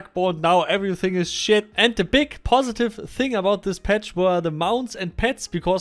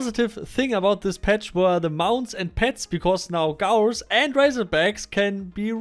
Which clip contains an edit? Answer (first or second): first